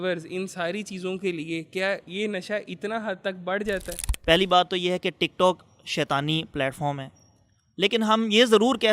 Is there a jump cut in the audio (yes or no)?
yes